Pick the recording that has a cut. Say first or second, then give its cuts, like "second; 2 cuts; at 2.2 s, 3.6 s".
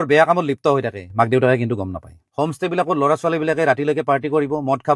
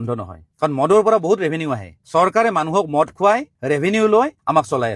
first; 1 cut; at 2.1 s